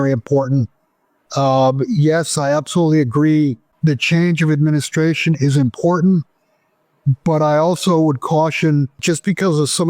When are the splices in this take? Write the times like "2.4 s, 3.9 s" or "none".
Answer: 3.7 s, 9.0 s